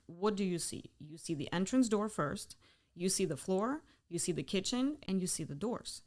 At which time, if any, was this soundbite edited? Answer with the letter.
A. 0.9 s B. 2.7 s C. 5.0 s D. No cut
C